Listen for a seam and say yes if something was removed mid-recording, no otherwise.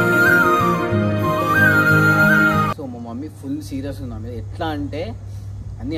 yes